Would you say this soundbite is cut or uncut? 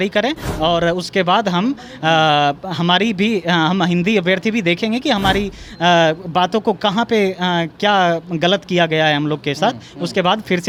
uncut